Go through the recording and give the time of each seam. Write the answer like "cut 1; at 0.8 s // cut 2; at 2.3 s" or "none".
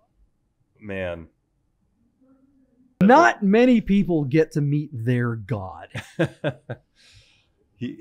cut 1; at 3.0 s